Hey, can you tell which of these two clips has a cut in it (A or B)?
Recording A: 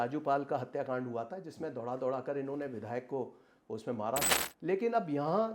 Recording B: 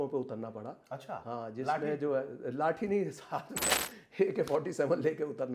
A